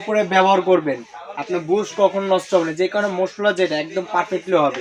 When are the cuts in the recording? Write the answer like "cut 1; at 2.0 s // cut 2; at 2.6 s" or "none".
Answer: none